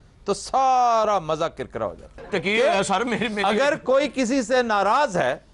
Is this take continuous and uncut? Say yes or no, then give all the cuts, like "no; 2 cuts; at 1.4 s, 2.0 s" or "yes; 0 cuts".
no; 1 cut; at 2.1 s